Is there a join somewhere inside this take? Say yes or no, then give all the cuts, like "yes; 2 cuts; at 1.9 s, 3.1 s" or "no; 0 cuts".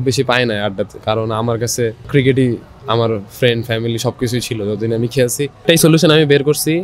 yes; 3 cuts; at 1.0 s, 2.0 s, 5.6 s